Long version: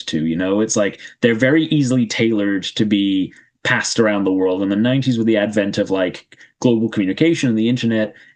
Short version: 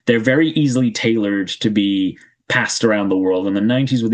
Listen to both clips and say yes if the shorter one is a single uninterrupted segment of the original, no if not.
yes